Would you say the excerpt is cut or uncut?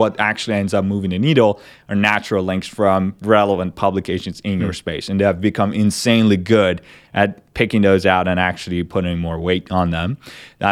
uncut